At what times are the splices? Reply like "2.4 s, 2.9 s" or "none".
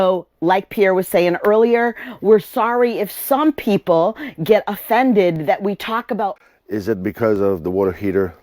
6.3 s